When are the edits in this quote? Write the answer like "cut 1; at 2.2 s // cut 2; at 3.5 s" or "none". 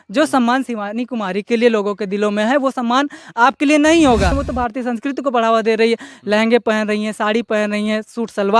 cut 1; at 4.4 s